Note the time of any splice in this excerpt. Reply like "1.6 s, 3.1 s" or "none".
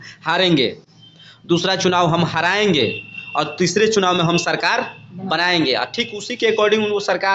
none

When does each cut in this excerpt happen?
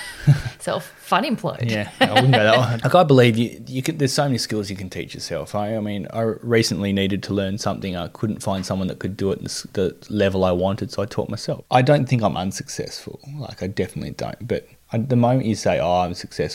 2.7 s, 11.5 s

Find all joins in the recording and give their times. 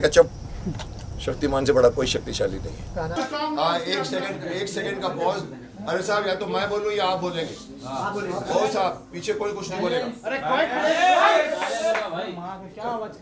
3.1 s

